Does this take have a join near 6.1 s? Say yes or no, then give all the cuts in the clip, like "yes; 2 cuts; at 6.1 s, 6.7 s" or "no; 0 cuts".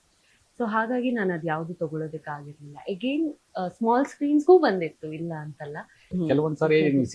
yes; 1 cut; at 6.1 s